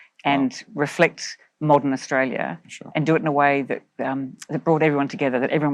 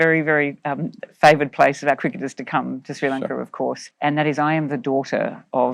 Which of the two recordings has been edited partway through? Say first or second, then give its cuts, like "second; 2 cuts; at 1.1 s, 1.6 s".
second; 1 cut; at 3.9 s